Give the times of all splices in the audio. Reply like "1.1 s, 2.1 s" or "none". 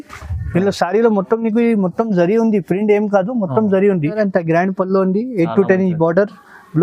4.2 s

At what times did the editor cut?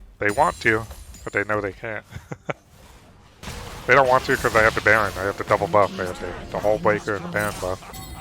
3.4 s

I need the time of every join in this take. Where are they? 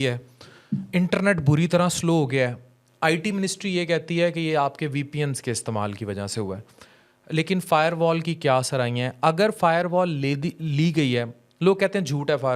none

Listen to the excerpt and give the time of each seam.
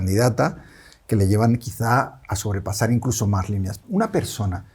3.8 s

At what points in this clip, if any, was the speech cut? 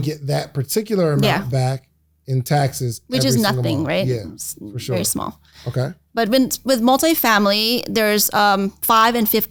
none

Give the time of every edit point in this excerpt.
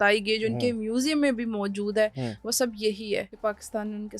3.3 s

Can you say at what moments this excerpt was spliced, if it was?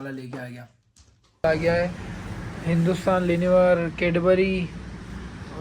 1.4 s

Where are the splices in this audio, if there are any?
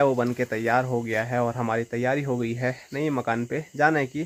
none

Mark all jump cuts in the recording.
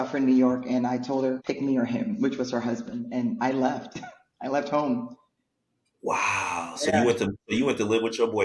1.4 s

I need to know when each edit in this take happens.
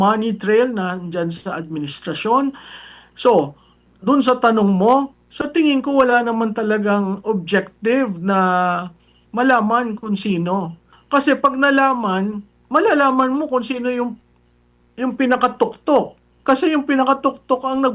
10.9 s

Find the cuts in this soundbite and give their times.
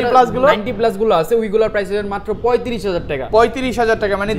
none

